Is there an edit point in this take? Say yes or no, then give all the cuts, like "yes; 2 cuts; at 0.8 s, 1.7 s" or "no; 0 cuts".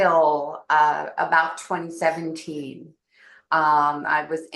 no; 0 cuts